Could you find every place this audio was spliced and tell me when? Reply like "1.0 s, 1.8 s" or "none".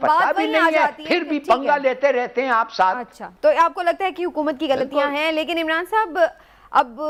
none